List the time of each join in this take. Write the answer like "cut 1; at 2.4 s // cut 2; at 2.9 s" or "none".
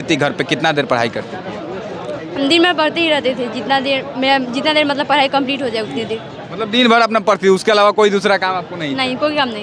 none